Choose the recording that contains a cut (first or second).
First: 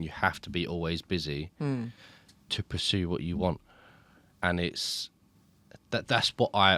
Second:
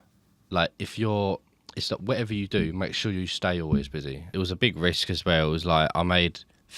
second